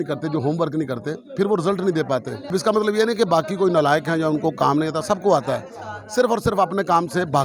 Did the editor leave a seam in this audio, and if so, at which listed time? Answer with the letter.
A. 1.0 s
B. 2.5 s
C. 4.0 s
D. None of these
B